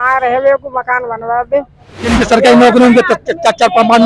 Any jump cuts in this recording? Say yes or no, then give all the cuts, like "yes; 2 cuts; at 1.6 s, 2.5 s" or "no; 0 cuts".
yes; 1 cut; at 2.1 s